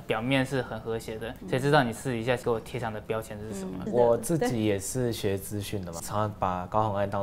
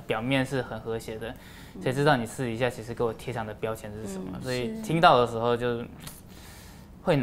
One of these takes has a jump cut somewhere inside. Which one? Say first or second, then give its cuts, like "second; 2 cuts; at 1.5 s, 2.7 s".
first; 4 cuts; at 1.3 s, 2.4 s, 3.8 s, 6.0 s